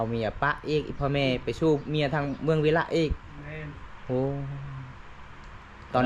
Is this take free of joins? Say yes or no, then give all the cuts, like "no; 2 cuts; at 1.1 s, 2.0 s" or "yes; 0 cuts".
yes; 0 cuts